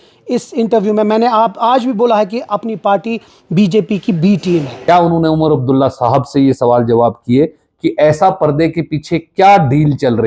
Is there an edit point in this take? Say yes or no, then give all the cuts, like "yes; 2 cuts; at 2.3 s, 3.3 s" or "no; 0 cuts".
yes; 1 cut; at 4.7 s